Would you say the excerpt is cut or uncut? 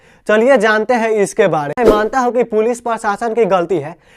cut